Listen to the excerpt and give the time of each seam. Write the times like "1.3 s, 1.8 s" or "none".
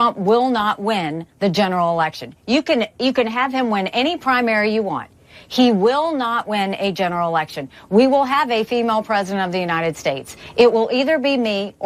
none